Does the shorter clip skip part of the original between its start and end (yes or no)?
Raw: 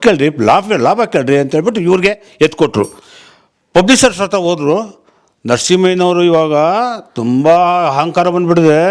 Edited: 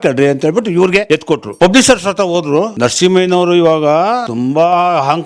yes